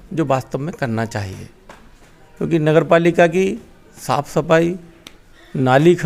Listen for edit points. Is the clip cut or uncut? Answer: uncut